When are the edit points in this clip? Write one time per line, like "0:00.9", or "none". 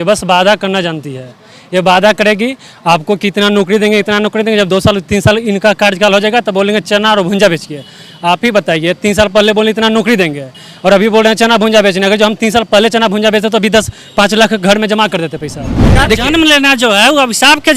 0:15.9